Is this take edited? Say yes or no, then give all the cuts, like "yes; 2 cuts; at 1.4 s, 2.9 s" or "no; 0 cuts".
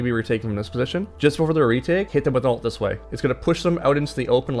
yes; 3 cuts; at 1.1 s, 2.1 s, 3.1 s